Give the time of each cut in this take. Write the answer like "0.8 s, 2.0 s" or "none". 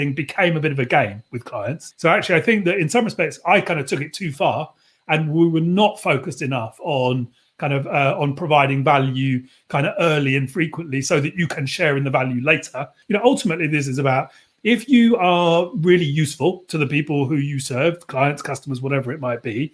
1.8 s, 12.9 s